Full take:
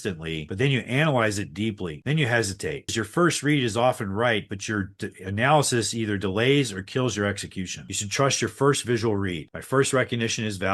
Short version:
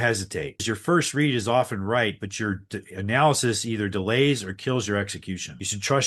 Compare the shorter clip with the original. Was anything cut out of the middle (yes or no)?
no